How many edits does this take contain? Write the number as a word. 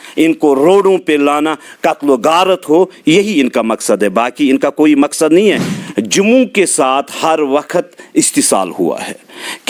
one